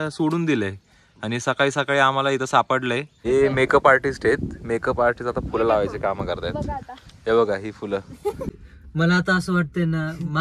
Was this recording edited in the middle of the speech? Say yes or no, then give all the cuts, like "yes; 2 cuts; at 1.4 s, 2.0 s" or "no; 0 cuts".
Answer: yes; 2 cuts; at 3.2 s, 8.7 s